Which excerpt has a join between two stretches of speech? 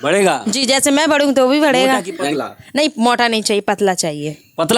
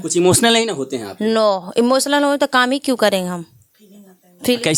first; 1 cut; at 2.2 s

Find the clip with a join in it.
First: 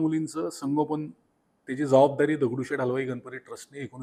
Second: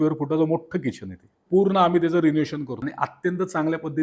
second; 2 cuts; at 1.4 s, 2.8 s

